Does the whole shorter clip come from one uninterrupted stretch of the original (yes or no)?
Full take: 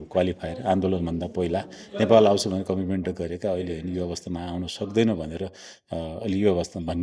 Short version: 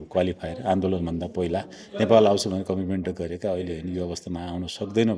yes